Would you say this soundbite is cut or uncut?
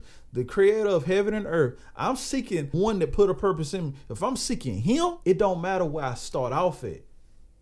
cut